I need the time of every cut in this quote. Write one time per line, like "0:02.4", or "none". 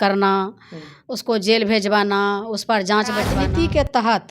0:03.3